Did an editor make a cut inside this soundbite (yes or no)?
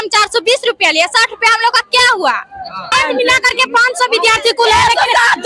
yes